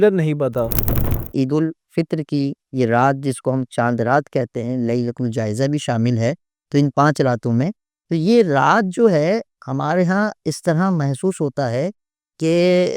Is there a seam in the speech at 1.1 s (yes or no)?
yes